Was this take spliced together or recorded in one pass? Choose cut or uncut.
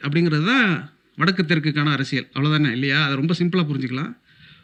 uncut